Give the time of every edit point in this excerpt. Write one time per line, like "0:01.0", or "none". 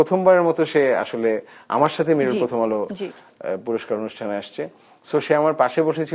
none